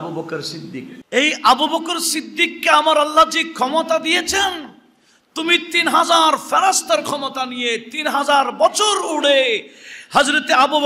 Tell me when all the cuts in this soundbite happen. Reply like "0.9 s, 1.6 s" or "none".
0.9 s

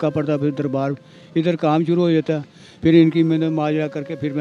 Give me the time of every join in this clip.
none

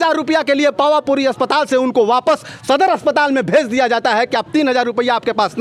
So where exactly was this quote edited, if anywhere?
none

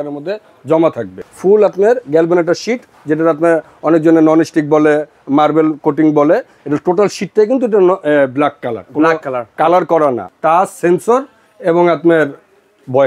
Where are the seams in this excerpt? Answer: 1.2 s, 10.3 s

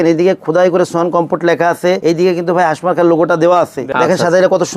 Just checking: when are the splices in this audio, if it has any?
2.0 s, 3.8 s

